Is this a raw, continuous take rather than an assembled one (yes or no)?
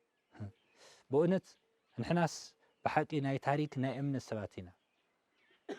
yes